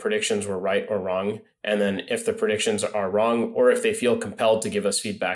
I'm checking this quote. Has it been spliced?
no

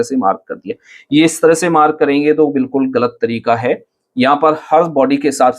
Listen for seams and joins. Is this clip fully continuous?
yes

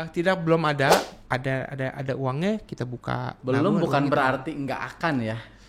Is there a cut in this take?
yes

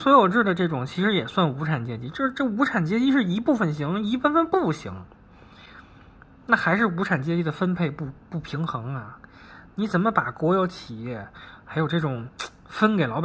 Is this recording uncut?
yes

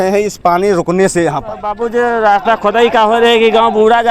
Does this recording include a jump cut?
yes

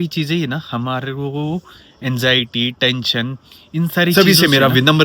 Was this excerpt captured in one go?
no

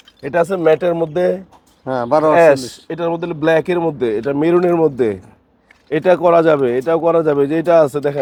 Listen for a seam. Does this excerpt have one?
no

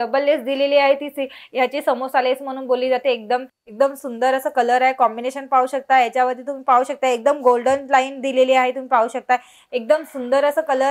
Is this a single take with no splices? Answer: no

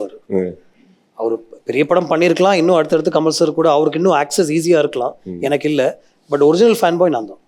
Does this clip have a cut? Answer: no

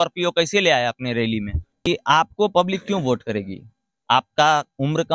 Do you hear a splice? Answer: yes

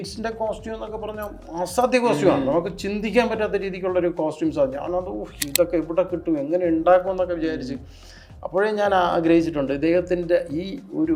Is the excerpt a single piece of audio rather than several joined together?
yes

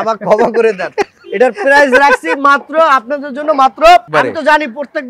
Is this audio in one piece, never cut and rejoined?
no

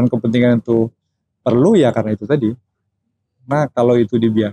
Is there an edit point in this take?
no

